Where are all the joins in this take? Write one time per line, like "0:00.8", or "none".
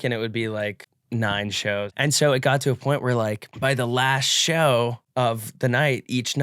0:00.9
0:01.9
0:03.5
0:05.0

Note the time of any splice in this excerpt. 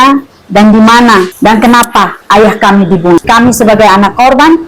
0:01.3
0:02.2
0:03.3

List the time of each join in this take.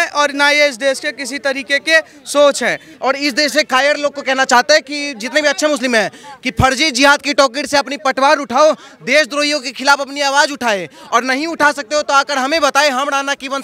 0:02.9

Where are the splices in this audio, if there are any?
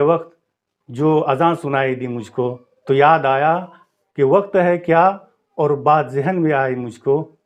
none

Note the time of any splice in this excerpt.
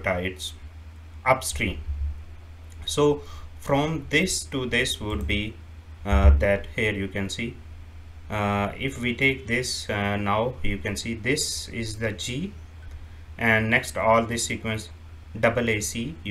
none

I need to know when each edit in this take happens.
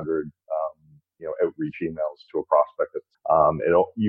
0:03.1

